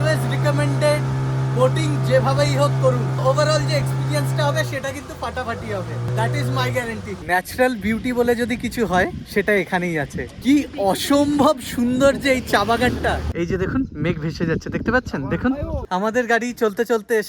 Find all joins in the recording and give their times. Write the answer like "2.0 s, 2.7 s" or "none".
3.2 s, 6.1 s, 7.1 s, 9.2 s, 10.2 s, 13.3 s, 15.8 s